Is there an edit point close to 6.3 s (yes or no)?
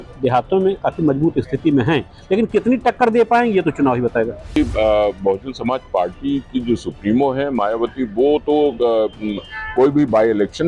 no